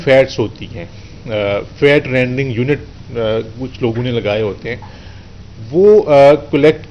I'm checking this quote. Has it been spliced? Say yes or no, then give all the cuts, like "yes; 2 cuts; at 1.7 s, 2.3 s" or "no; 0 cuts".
no; 0 cuts